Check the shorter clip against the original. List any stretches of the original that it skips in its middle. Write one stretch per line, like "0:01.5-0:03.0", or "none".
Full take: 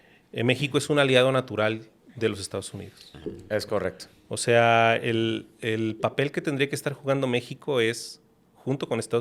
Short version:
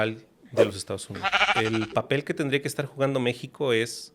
0:03.1-0:05.5